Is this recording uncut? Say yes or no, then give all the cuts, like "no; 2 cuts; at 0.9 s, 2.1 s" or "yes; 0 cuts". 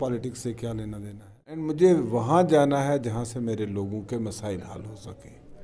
no; 1 cut; at 1.6 s